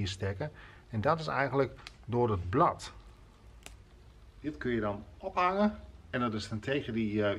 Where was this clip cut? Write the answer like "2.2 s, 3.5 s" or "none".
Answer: 4.4 s

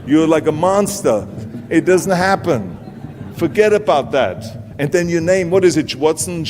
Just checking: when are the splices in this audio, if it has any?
1.4 s

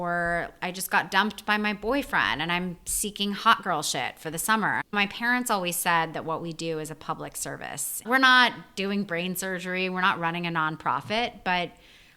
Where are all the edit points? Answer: 4.8 s

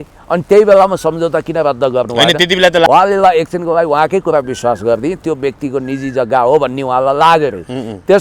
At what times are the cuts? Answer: 2.9 s

